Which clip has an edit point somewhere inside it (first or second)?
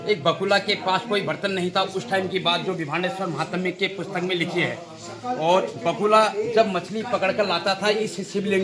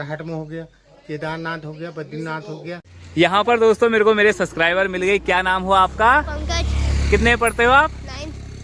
second